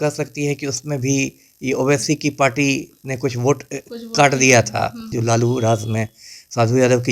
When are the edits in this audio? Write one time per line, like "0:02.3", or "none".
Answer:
0:05.1

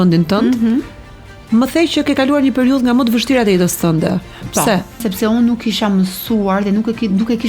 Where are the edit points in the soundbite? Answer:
0:05.1

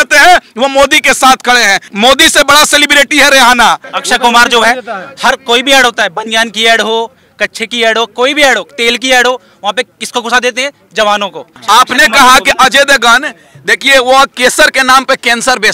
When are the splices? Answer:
0:01.8
0:03.9
0:11.5

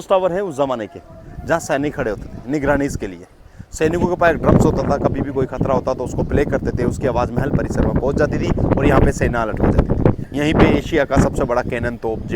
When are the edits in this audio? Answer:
0:10.2

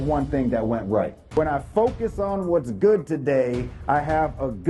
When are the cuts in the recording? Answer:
0:01.2

